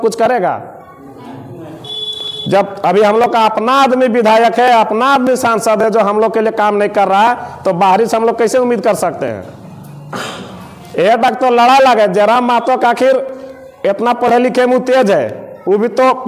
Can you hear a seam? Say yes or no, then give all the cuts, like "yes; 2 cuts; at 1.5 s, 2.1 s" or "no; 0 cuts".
no; 0 cuts